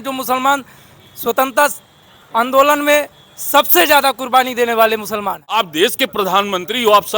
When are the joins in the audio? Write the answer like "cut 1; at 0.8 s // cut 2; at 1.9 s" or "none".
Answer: cut 1; at 5.4 s